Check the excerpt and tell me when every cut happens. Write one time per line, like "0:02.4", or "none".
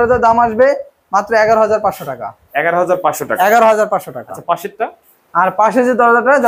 none